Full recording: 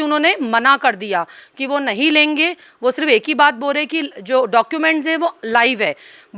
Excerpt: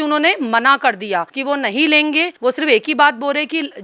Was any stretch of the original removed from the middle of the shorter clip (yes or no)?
yes